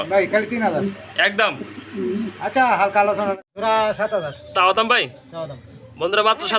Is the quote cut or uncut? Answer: cut